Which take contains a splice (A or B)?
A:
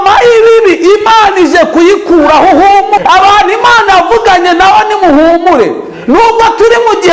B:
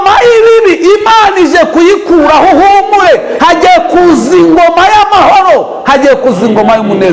A